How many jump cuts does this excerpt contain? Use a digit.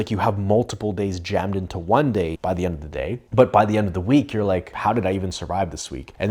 1